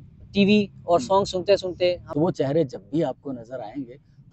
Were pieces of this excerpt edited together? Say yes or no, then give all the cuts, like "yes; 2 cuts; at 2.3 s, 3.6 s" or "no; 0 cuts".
yes; 1 cut; at 2.0 s